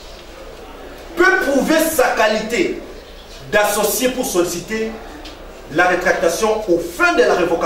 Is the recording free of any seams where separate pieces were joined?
yes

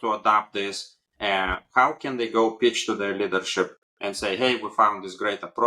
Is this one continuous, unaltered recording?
yes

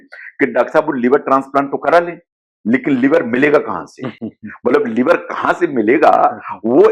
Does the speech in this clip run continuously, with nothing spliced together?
yes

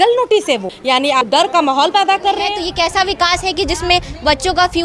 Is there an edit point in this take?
yes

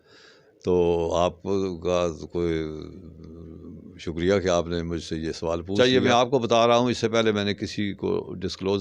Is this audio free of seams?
no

